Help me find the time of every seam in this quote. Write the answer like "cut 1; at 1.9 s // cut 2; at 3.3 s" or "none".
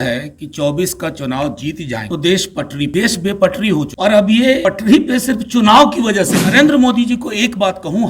cut 1; at 2.0 s // cut 2; at 2.9 s // cut 3; at 3.9 s // cut 4; at 4.6 s // cut 5; at 6.5 s